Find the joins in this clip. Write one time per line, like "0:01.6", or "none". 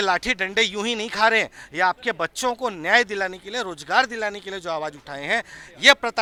none